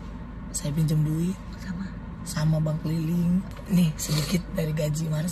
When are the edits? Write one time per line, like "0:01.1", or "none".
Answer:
0:03.6